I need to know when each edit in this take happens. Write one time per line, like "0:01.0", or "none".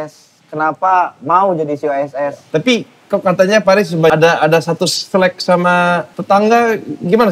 0:02.4
0:04.1
0:06.1